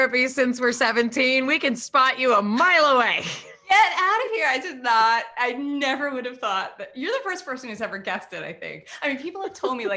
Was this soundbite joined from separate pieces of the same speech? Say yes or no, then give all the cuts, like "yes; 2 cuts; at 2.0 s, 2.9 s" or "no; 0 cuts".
no; 0 cuts